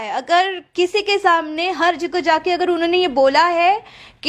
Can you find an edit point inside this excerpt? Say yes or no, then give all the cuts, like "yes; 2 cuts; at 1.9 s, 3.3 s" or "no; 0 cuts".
no; 0 cuts